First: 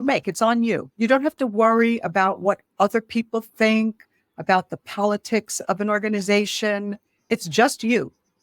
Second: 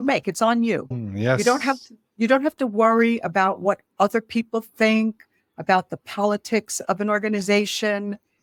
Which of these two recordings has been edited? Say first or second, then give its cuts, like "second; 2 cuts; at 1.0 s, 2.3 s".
first; 2 cuts; at 0.9 s, 7.3 s